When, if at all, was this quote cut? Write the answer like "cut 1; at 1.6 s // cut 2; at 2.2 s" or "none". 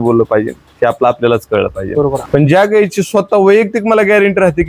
cut 1; at 2.2 s